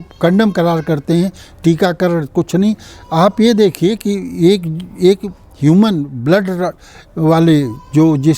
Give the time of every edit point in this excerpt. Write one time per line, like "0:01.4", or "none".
none